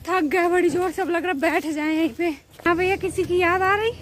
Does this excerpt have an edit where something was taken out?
yes; 1 cut; at 2.7 s

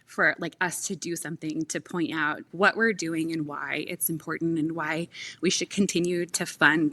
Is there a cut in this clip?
yes; 1 cut; at 2.4 s

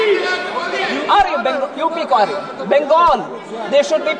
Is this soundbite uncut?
yes; 0 cuts

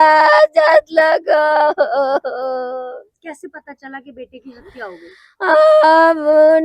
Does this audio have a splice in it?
no; 0 cuts

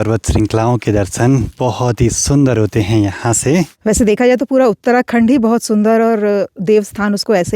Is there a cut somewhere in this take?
yes; 1 cut; at 3.7 s

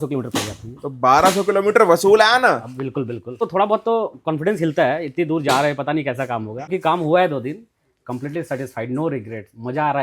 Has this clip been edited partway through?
yes; 2 cuts; at 3.5 s, 6.7 s

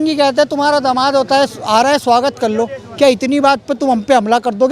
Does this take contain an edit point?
no; 0 cuts

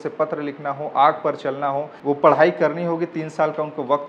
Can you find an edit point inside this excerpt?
yes; 1 cut; at 1.9 s

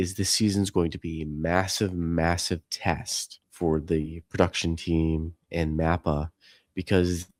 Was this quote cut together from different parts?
no; 0 cuts

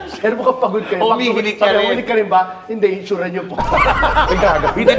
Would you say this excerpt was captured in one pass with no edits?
yes; 0 cuts

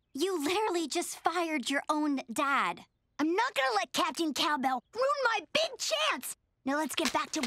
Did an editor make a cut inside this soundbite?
no; 0 cuts

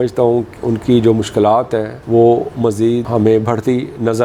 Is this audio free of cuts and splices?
yes; 0 cuts

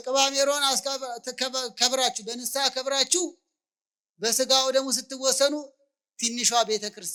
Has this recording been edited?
no; 0 cuts

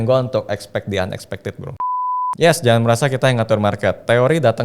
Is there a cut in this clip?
yes; 1 cut; at 1.9 s

